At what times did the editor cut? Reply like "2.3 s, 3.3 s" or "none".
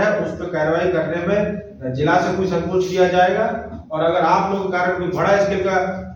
none